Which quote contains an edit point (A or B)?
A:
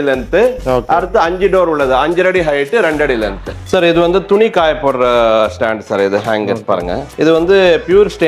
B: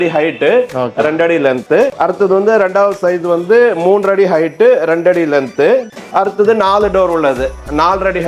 A